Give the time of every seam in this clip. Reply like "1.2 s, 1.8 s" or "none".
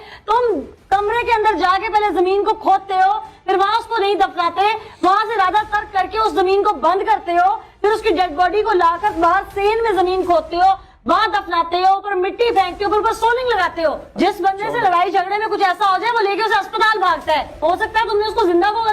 17.5 s